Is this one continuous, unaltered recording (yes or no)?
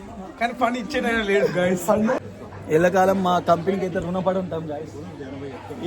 no